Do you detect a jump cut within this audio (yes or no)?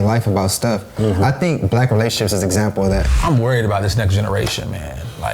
yes